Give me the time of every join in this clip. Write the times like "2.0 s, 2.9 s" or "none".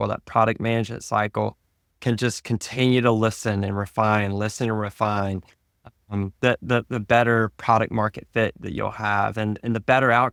none